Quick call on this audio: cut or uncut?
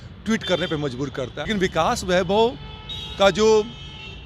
cut